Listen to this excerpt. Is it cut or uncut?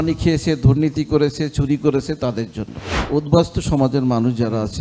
cut